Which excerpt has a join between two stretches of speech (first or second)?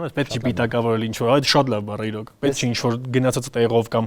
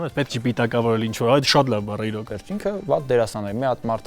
second